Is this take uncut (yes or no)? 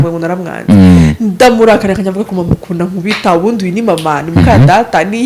yes